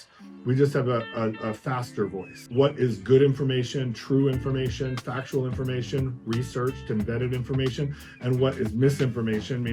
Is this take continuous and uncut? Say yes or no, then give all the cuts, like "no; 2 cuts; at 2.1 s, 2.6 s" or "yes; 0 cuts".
no; 1 cut; at 2.3 s